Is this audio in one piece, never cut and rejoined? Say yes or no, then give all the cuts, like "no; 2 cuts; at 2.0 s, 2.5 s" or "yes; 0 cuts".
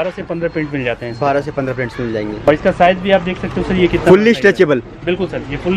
no; 1 cut; at 2.5 s